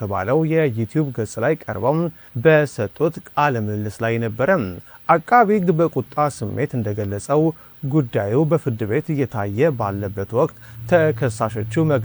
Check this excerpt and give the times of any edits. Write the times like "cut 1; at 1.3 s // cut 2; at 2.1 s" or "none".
none

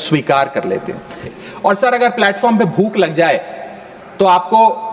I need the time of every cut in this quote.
cut 1; at 1.1 s

